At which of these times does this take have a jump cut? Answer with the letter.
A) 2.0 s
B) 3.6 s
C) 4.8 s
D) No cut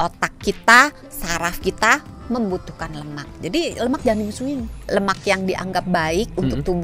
C